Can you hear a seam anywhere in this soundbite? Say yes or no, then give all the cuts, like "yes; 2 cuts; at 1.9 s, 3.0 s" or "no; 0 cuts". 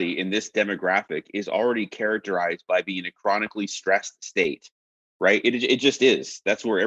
no; 0 cuts